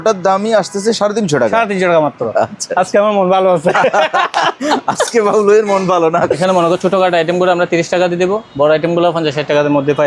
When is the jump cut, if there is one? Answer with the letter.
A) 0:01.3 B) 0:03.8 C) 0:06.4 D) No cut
C